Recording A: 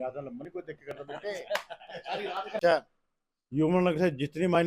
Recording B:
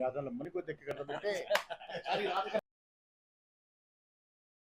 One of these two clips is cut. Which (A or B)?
A